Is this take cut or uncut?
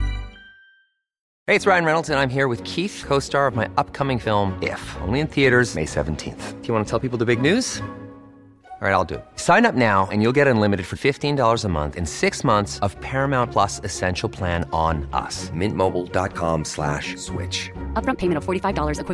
cut